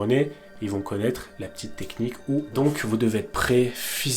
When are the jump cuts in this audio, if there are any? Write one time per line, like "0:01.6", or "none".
0:02.5